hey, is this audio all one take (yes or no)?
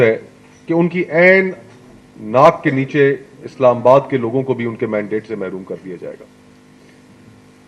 yes